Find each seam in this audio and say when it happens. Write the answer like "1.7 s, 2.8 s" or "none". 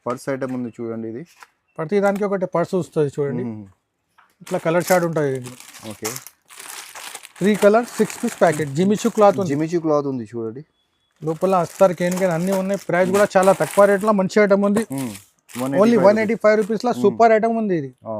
none